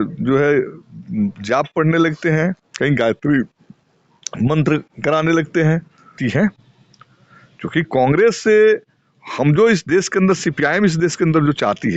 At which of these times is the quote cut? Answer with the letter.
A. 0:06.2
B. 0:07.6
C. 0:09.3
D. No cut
A